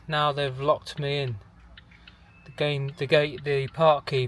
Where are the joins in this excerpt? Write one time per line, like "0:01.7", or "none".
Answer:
none

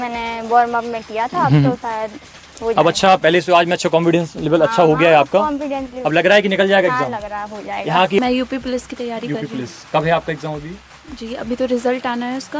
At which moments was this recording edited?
0:08.2

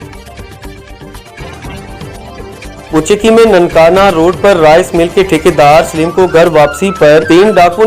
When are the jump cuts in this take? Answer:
0:02.9

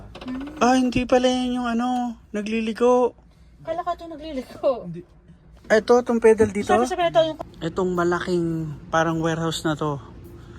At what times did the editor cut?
0:07.4

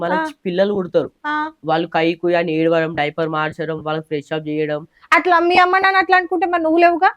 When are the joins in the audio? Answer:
none

